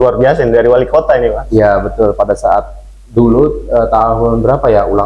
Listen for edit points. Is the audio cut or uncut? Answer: uncut